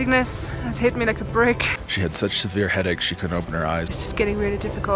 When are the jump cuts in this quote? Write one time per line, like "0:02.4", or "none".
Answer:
0:01.7
0:03.9

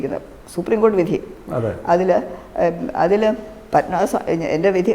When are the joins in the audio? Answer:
none

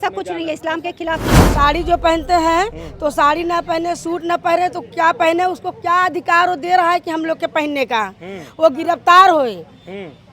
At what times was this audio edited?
0:01.5

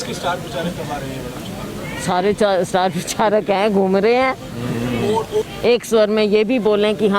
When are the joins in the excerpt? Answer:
0:05.5

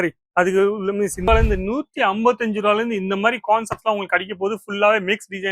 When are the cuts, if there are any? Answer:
0:01.3

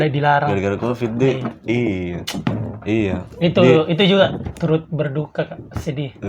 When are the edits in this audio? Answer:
none

